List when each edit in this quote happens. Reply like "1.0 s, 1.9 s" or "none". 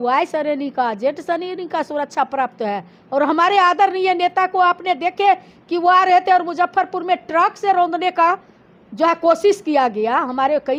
none